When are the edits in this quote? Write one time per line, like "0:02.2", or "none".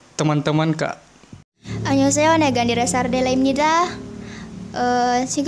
0:01.6